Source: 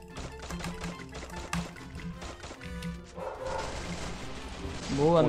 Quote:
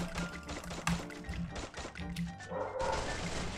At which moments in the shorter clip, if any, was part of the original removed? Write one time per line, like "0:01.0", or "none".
none